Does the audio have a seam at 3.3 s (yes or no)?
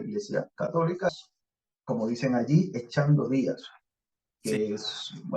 no